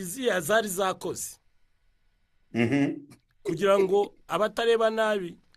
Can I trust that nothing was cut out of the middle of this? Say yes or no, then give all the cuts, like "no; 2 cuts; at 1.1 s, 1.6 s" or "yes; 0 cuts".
yes; 0 cuts